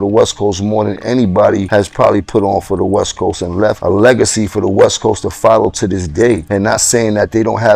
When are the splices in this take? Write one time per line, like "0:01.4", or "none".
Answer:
0:01.7
0:03.8
0:06.4